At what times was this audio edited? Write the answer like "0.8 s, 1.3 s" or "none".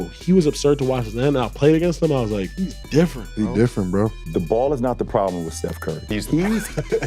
2.6 s, 4.2 s, 6.0 s